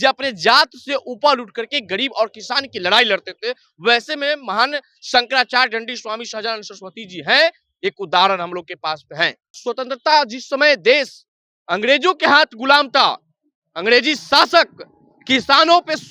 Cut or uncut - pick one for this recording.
cut